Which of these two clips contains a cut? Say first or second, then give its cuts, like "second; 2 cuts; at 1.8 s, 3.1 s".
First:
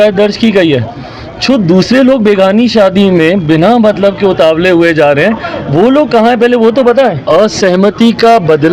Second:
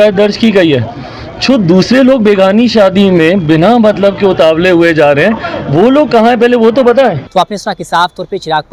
first; 1 cut; at 7.2 s